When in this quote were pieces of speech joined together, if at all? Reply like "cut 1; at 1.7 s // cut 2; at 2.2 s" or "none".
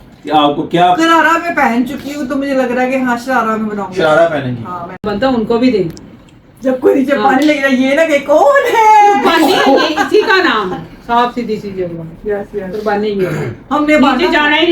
cut 1; at 5.0 s

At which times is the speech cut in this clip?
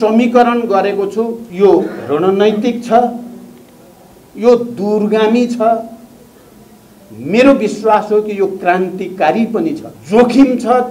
cut 1; at 1.4 s // cut 2; at 9.9 s

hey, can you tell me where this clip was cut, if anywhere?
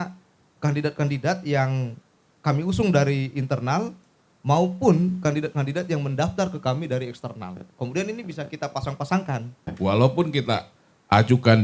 cut 1; at 9.7 s

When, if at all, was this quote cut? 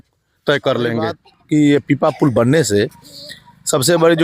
cut 1; at 1.3 s

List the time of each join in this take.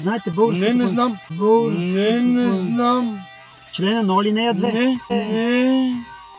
none

